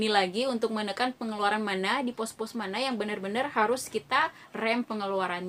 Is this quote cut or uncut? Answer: uncut